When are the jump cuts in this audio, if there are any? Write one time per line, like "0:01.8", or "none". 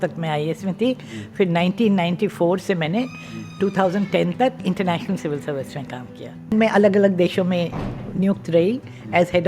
0:06.5